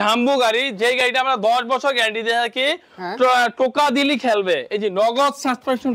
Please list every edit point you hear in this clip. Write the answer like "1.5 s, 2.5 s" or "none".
none